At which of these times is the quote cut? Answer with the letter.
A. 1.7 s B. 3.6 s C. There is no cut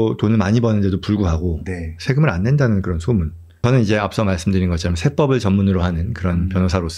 B